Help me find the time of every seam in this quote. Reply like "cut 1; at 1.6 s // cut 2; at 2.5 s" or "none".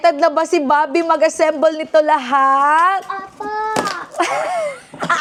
none